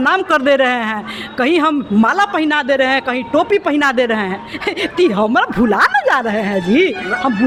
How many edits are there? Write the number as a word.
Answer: zero